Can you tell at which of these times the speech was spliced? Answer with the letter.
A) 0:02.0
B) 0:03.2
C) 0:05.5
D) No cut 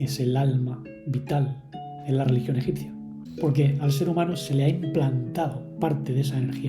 B